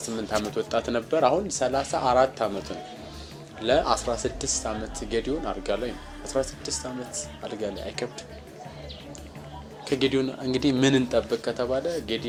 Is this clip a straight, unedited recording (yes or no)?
yes